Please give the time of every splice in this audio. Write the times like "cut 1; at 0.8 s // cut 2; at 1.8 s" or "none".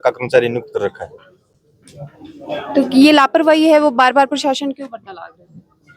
none